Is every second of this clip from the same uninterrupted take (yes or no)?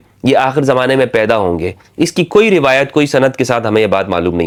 yes